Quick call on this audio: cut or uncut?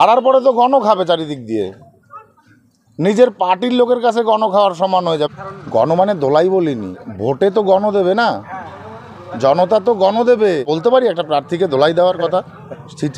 cut